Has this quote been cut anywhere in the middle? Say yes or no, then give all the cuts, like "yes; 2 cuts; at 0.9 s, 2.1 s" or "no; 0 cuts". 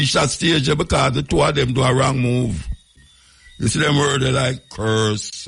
yes; 1 cut; at 3.0 s